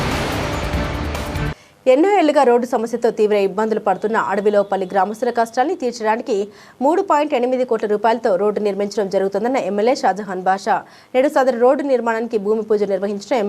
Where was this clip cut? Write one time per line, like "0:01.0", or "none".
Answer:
0:01.5